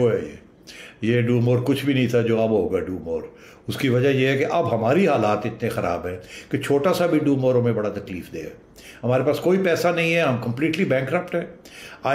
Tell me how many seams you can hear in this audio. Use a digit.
0